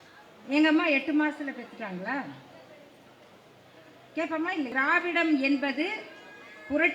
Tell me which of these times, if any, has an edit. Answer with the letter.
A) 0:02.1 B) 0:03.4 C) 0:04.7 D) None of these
C